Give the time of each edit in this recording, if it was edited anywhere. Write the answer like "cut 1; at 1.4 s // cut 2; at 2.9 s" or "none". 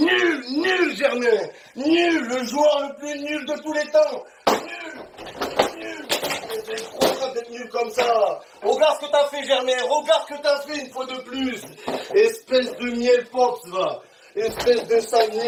none